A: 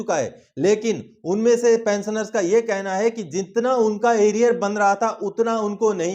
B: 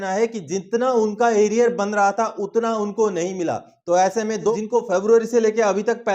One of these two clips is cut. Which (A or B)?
B